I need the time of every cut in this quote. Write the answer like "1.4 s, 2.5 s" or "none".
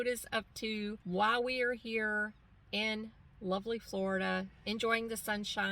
1.0 s